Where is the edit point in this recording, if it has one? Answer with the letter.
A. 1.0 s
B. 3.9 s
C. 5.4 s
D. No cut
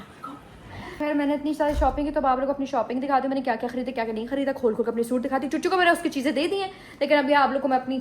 A